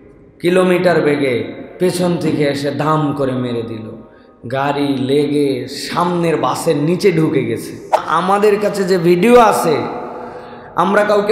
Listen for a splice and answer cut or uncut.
cut